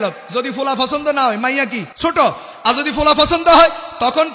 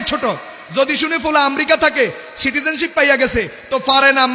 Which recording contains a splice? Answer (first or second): first